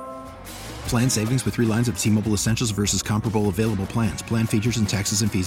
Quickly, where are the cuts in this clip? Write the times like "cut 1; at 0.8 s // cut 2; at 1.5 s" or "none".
none